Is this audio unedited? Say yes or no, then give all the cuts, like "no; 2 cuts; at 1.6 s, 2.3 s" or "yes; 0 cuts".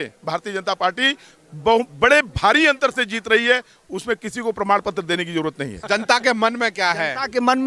no; 1 cut; at 5.7 s